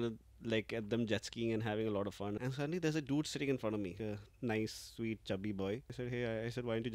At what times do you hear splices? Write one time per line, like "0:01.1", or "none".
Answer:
0:02.4
0:04.1
0:05.9